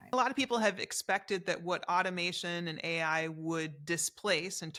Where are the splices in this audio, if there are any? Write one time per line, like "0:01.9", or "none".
none